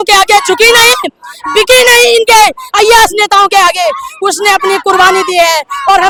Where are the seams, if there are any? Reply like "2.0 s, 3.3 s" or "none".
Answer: none